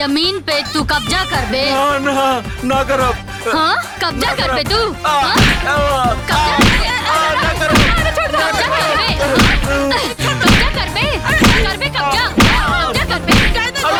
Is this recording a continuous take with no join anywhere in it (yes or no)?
yes